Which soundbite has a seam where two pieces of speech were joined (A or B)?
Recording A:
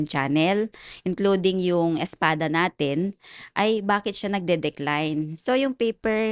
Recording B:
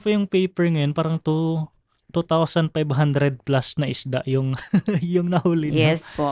A